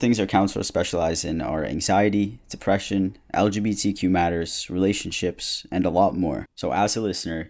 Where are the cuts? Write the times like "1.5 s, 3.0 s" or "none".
6.5 s